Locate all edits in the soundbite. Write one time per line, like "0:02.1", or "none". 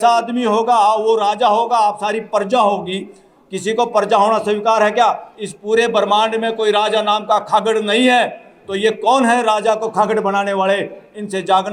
none